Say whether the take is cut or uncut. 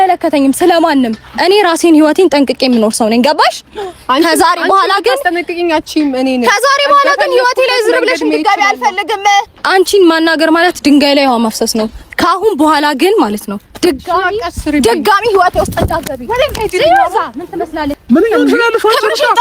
cut